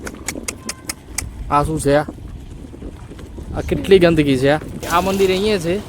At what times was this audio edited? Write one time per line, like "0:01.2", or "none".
0:04.9